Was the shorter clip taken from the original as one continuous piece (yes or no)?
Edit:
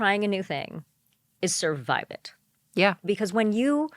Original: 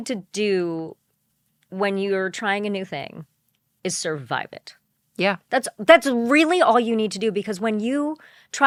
no